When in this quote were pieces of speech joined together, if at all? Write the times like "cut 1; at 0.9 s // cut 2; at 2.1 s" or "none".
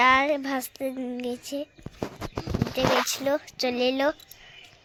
none